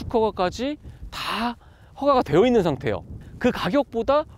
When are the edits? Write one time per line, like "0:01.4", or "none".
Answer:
0:03.2